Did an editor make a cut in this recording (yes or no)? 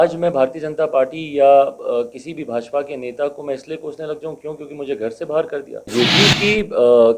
yes